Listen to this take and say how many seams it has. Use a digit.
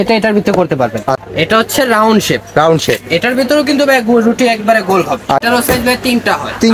2